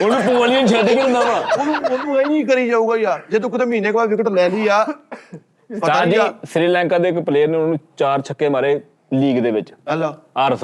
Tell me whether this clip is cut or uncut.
uncut